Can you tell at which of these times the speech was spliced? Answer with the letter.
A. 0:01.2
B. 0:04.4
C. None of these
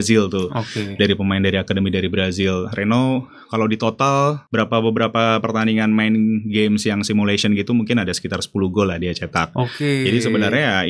B